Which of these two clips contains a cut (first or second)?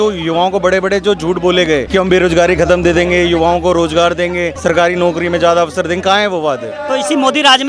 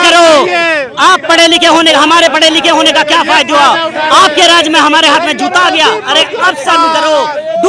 first